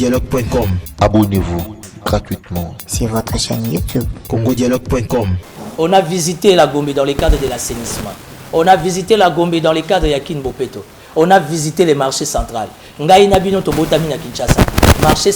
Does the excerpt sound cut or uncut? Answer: cut